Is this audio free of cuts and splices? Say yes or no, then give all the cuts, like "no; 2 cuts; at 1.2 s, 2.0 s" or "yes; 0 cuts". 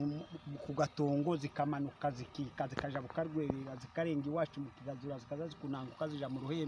yes; 0 cuts